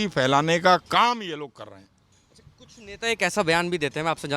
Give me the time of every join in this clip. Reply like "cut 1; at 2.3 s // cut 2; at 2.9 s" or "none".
none